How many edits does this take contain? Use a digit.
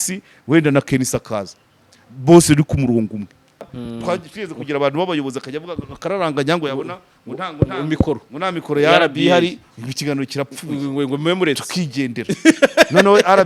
1